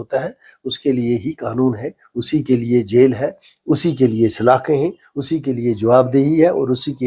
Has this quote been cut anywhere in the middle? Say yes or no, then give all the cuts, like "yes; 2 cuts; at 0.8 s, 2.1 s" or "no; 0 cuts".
no; 0 cuts